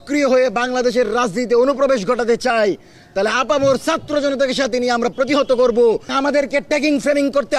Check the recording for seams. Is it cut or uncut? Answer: cut